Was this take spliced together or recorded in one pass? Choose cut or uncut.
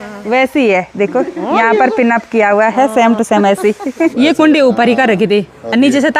cut